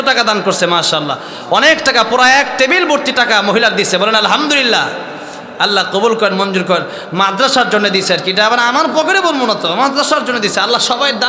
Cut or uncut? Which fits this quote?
uncut